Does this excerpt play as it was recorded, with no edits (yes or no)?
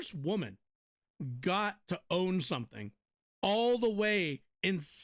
yes